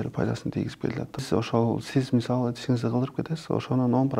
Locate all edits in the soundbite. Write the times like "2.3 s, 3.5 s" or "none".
1.2 s